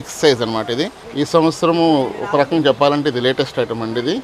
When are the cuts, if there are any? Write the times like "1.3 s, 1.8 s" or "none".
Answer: 1.0 s